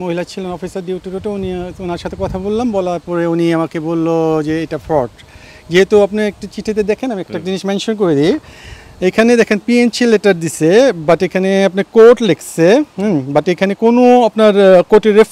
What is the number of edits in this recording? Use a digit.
0